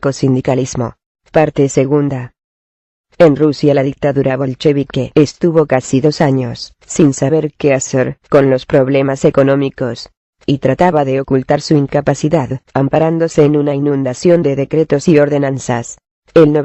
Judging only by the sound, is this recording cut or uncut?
uncut